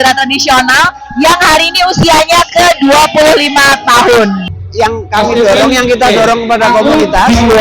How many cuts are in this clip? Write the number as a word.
one